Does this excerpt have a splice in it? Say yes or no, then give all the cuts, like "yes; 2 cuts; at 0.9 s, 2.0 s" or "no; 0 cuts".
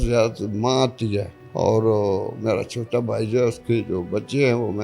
yes; 1 cut; at 1.4 s